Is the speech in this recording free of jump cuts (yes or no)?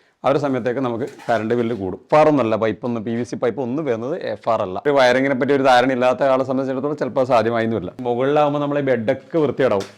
no